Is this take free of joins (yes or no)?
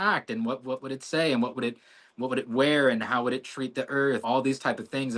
no